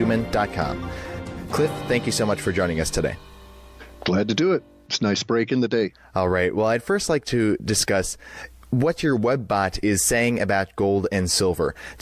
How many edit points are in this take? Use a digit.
1